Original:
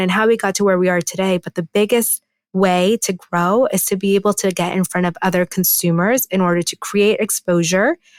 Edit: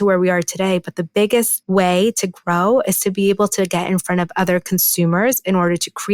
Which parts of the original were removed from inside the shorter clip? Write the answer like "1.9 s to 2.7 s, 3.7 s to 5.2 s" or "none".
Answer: 2.2 s to 2.4 s